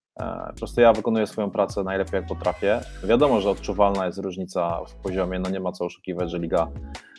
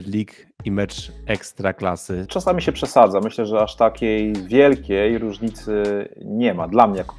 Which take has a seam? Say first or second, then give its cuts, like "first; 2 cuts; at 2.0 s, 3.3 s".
second; 1 cut; at 2.3 s